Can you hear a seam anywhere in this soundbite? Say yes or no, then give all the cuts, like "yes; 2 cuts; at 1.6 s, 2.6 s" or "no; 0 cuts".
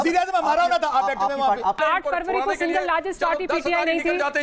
yes; 1 cut; at 1.8 s